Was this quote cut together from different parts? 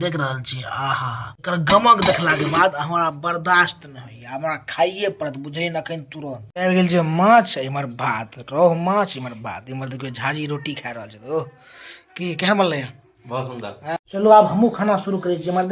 yes; 3 cuts; at 1.3 s, 6.5 s, 14.0 s

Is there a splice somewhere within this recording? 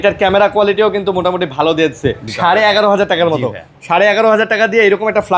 yes; 1 cut; at 2.3 s

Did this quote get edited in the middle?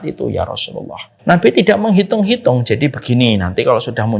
yes; 1 cut; at 1.0 s

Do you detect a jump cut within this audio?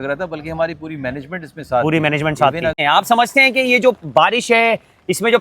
yes; 1 cut; at 2.8 s

